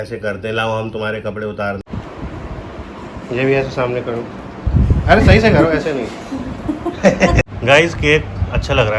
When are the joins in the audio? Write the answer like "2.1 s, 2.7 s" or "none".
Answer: 1.8 s, 7.5 s

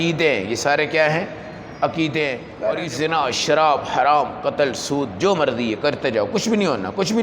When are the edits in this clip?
2.5 s

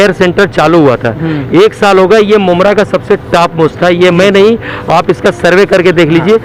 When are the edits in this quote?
none

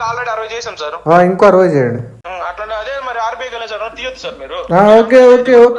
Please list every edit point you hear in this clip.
2.2 s

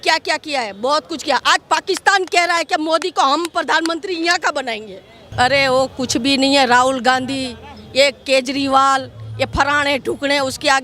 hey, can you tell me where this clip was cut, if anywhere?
5.2 s

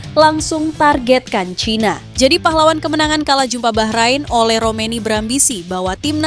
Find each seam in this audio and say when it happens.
2.0 s

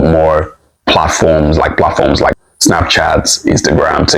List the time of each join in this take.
2.5 s

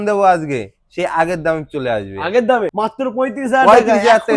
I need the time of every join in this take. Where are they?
2.7 s

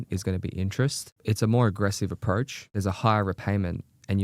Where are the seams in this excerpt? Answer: 1.1 s, 2.6 s

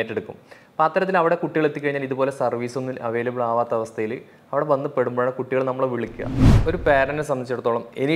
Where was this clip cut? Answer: 6.6 s

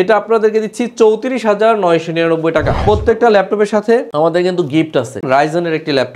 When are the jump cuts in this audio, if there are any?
2.8 s, 5.2 s

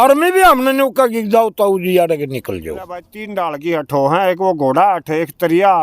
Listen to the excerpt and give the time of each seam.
3.2 s

